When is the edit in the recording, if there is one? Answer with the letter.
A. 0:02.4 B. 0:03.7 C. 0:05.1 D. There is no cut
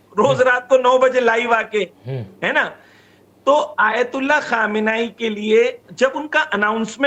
D